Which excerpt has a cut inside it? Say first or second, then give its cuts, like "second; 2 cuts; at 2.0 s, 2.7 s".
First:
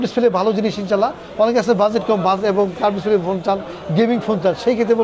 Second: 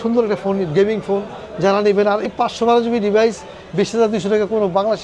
second; 1 cut; at 2.2 s